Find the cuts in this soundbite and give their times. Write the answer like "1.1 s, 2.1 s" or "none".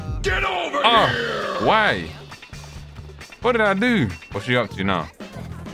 4.2 s